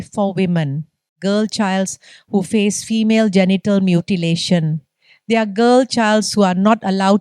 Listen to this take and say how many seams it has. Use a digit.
1